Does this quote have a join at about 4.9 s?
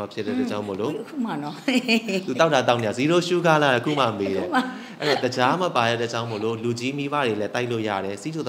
no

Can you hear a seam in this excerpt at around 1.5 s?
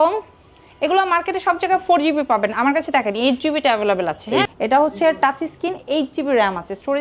no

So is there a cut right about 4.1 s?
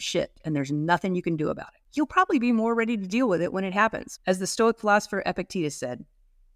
yes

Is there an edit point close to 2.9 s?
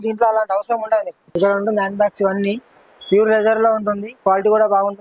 no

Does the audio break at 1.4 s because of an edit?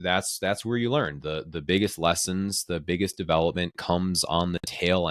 no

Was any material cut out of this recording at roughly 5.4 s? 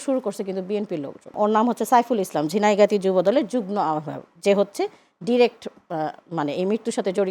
no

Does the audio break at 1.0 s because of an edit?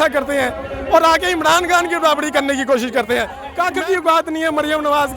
no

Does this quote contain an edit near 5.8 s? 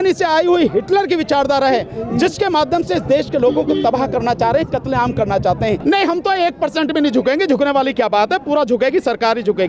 yes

